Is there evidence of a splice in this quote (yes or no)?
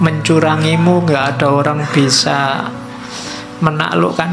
no